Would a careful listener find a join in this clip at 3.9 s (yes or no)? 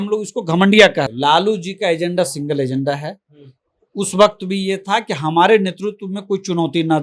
no